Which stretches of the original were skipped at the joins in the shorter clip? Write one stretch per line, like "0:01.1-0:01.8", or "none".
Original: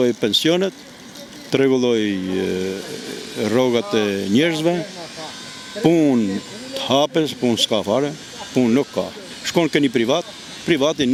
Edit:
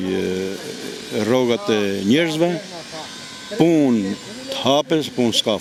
none

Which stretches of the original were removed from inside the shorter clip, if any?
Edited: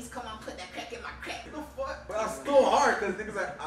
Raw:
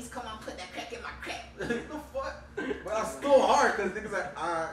0:01.6-0:02.3

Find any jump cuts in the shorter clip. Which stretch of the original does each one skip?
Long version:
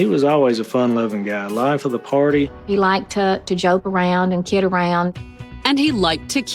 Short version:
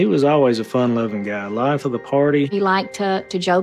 0:02.5-0:02.7

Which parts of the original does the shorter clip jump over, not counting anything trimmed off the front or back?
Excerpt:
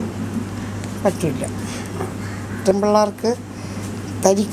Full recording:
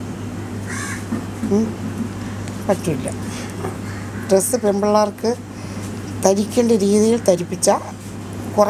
0:04.3-0:04.7

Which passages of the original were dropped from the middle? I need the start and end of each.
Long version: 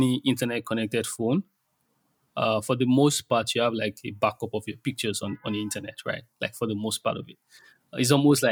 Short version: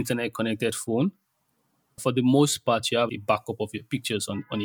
0:02.3-0:02.6
0:03.7-0:04.0

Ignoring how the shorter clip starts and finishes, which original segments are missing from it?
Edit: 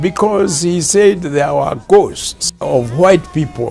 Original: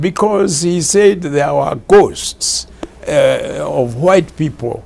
0:02.6-0:03.6

